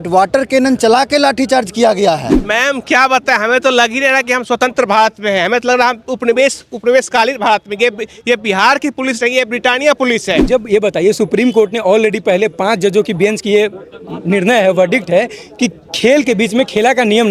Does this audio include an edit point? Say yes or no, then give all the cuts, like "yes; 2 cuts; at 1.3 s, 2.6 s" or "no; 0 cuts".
yes; 2 cuts; at 2.4 s, 10.4 s